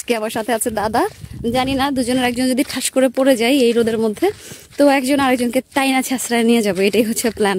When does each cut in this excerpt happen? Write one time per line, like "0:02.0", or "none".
none